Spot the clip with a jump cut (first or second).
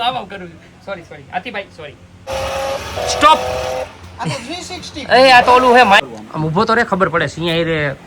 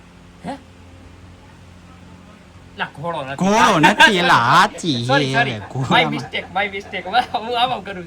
first